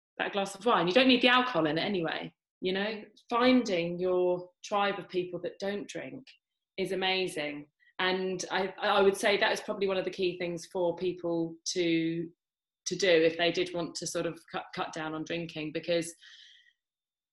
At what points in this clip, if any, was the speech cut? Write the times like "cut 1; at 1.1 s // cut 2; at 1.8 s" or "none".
cut 1; at 3.1 s